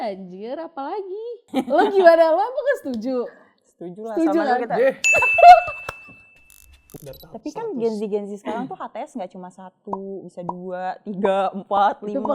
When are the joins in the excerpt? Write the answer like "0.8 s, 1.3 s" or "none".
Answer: 1.4 s, 6.8 s